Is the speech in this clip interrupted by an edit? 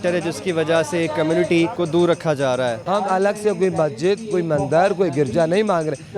yes; 2 cuts; at 1.7 s, 2.8 s

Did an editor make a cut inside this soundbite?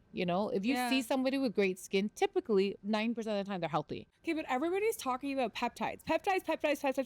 yes; 2 cuts; at 2.8 s, 4.0 s

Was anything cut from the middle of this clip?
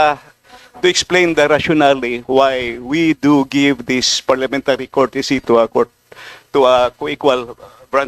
no; 0 cuts

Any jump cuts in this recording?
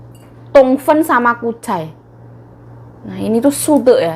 no; 0 cuts

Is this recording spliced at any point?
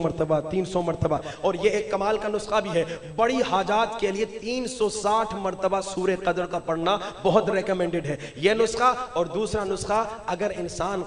no; 0 cuts

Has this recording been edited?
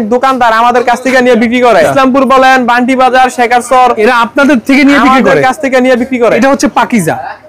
yes; 3 cuts; at 1.9 s, 4.0 s, 6.4 s

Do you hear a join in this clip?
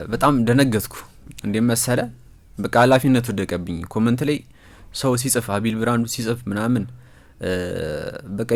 no; 0 cuts

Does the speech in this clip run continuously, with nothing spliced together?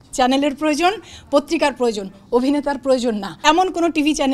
no; 1 cut; at 3.3 s

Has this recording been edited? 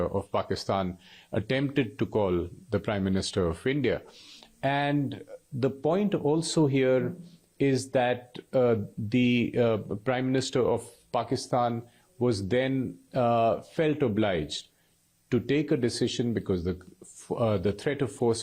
no; 0 cuts

